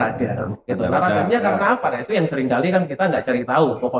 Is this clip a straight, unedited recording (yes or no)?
yes